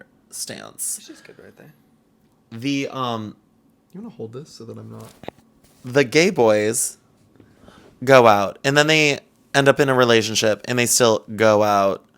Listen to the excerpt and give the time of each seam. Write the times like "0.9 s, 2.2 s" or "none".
none